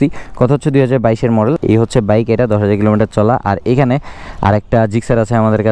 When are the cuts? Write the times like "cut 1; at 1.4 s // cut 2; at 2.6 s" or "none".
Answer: cut 1; at 1.6 s